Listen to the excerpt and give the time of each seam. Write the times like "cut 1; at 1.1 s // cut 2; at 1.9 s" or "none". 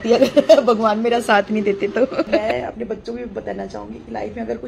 cut 1; at 2.4 s